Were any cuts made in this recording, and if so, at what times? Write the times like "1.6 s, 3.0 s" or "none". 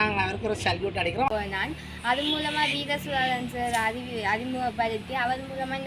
1.3 s